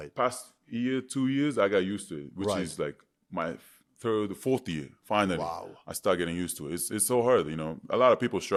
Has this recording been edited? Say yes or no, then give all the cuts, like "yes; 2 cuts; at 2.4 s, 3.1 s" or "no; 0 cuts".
no; 0 cuts